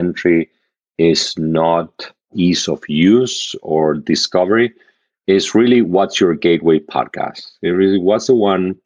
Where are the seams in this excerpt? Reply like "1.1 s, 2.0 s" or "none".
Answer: 2.3 s